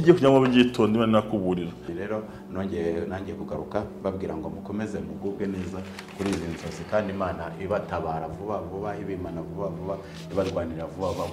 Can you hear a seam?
yes; 1 cut; at 1.8 s

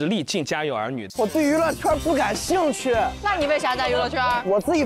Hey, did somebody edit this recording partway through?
yes; 1 cut; at 1.0 s

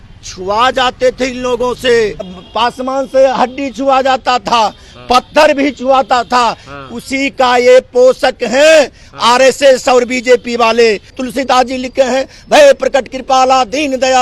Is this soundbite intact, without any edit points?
no; 2 cuts; at 2.3 s, 11.2 s

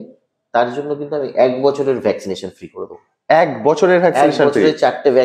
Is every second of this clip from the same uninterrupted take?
yes; 0 cuts

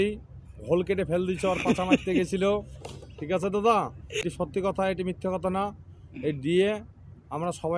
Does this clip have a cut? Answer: yes; 1 cut; at 4.2 s

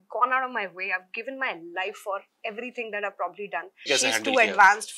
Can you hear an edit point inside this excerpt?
yes; 1 cut; at 3.9 s

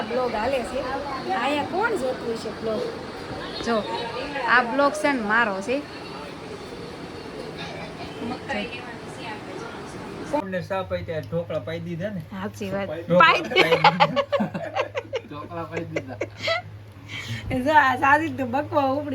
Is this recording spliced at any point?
yes; 1 cut; at 10.4 s

